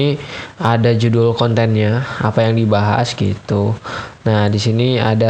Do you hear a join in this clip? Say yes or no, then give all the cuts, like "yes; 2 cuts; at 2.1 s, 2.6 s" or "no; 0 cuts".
no; 0 cuts